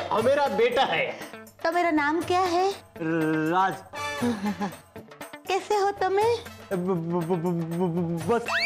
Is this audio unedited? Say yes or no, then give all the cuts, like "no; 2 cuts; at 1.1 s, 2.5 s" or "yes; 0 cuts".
yes; 0 cuts